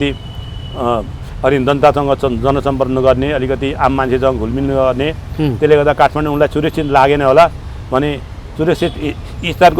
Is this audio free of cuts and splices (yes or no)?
yes